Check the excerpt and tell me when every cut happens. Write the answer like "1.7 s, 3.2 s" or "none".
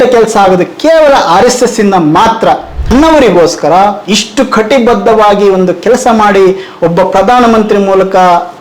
2.9 s